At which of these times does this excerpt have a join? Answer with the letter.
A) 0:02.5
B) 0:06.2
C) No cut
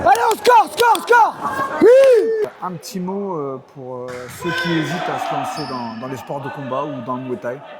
A